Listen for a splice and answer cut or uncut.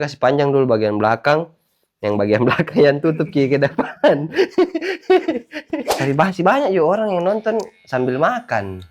cut